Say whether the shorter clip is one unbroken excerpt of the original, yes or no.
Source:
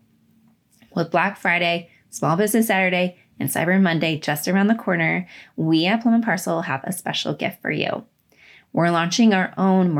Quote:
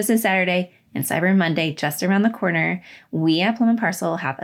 yes